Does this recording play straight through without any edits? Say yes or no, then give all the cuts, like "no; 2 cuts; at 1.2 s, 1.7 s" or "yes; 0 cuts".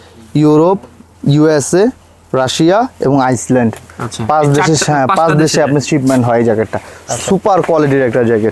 yes; 0 cuts